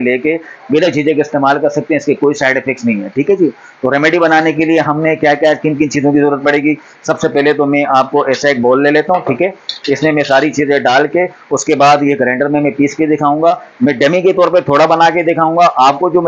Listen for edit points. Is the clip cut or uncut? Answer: uncut